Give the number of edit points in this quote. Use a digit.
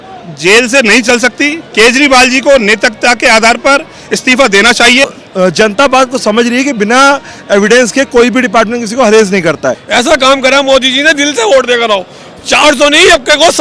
2